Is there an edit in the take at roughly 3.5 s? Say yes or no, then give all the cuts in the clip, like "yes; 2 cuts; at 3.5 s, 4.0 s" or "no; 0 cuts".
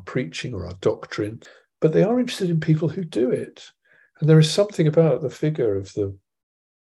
no; 1 cut; at 1.4 s